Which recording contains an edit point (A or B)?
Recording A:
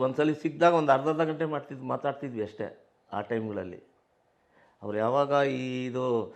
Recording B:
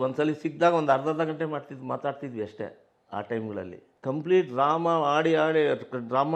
B